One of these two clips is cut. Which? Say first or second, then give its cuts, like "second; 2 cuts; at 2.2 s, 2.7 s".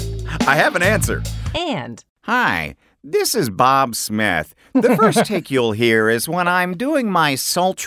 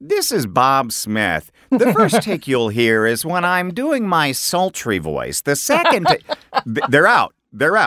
first; 1 cut; at 1.7 s